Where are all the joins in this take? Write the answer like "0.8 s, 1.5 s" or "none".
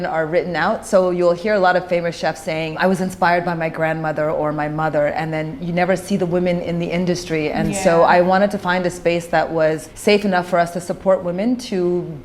2.8 s, 9.9 s